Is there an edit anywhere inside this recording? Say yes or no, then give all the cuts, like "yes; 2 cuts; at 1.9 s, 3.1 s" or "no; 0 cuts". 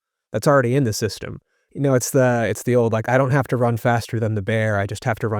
yes; 1 cut; at 1.6 s